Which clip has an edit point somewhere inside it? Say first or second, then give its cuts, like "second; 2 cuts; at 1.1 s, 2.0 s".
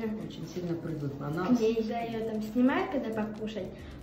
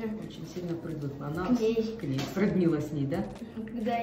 first; 1 cut; at 1.9 s